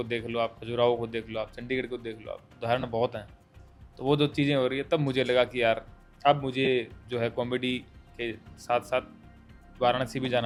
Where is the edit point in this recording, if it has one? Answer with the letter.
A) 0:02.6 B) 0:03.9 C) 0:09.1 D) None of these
D